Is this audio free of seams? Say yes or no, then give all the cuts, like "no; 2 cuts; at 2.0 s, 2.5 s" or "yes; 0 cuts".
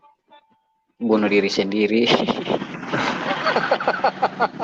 yes; 0 cuts